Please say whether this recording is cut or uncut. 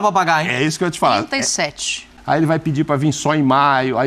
cut